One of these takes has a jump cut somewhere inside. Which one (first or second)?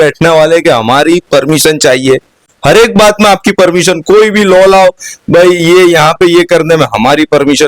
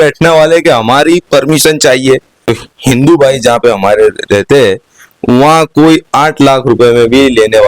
second